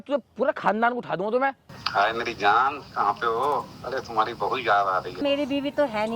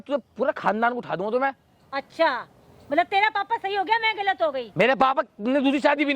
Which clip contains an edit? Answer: first; 2 cuts; at 1.7 s, 5.2 s

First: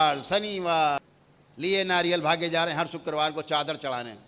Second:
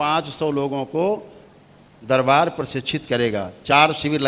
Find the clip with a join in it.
first; 1 cut; at 1.1 s

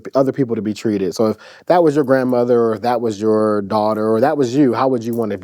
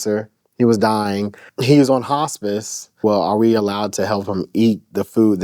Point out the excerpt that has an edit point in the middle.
second; 2 cuts; at 1.4 s, 3.0 s

